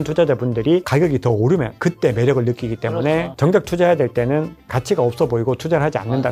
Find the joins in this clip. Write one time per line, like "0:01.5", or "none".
0:03.4
0:04.6